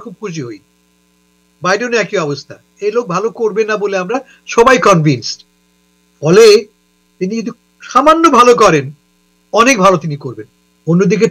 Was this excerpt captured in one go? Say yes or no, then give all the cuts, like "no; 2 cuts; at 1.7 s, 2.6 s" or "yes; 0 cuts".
yes; 0 cuts